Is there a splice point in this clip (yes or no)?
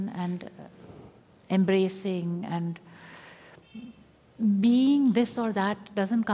no